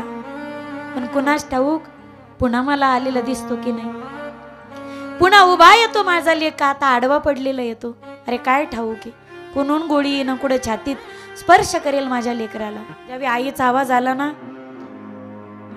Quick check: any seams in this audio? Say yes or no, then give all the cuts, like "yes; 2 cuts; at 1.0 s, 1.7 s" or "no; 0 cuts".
yes; 1 cut; at 13.2 s